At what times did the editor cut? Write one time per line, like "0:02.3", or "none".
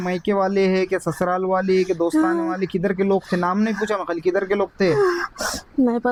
none